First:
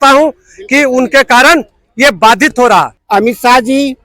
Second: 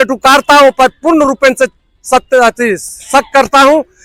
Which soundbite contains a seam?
first; 1 cut; at 3.0 s

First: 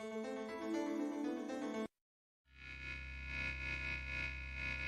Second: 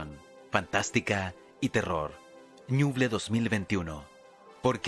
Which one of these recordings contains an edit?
first; 1 cut; at 2.3 s

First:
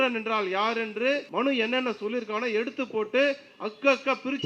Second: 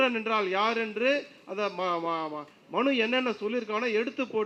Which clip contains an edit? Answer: first; 1 cut; at 1.3 s

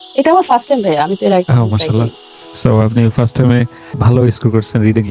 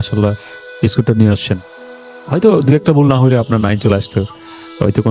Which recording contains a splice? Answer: first; 1 cut; at 4.0 s

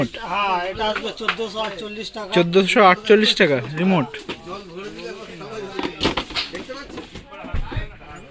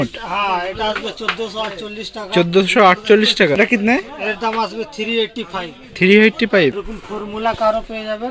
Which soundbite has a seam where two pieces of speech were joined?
second; 2 cuts; at 3.6 s, 6.8 s

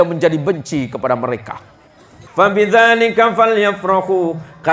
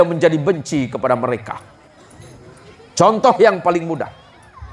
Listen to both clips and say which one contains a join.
first; 1 cut; at 2.2 s

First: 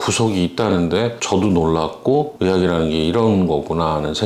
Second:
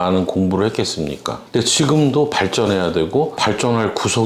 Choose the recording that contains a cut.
second; 1 cut; at 1.4 s

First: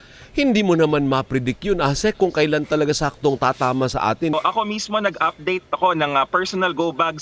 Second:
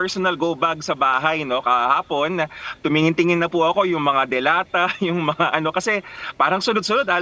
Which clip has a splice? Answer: first; 1 cut; at 4.3 s

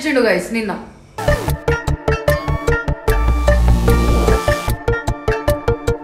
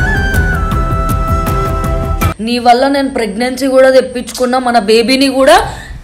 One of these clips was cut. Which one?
second; 1 cut; at 2.3 s

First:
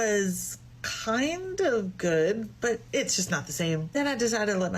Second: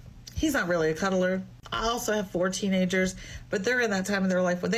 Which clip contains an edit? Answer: first; 1 cut; at 2.8 s

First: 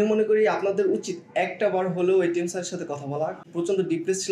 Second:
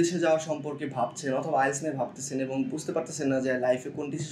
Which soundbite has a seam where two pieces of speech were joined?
first; 1 cut; at 3.4 s

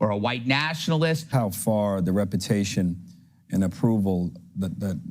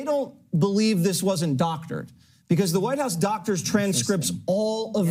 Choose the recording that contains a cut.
first; 1 cut; at 1.3 s

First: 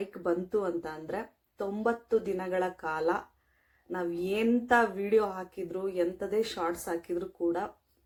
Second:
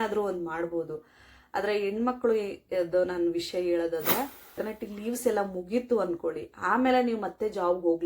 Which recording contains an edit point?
second; 1 cut; at 4.6 s

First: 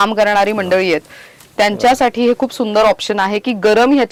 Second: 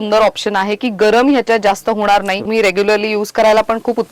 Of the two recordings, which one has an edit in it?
second; 1 cut; at 2.5 s

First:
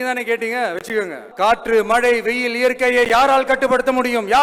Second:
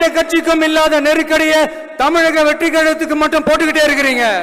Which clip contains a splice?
first; 1 cut; at 1.2 s

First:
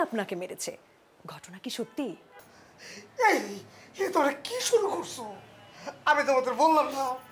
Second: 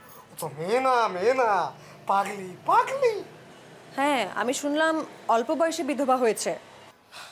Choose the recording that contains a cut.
first; 1 cut; at 2.2 s

